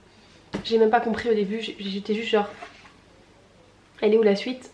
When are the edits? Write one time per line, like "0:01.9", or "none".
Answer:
none